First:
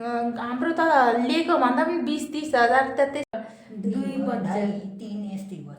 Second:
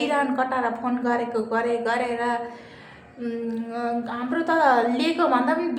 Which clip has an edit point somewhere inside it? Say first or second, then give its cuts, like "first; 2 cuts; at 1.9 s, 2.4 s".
first; 1 cut; at 3.3 s